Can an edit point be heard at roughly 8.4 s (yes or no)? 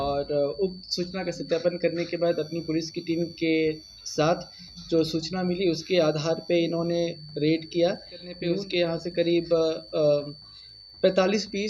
yes